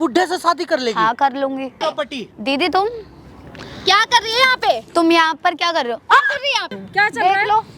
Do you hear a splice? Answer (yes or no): yes